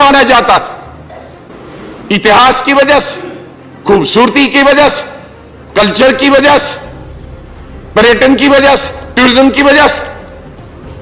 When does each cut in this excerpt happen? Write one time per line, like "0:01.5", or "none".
none